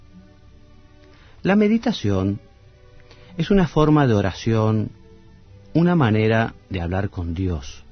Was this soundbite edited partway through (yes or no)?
yes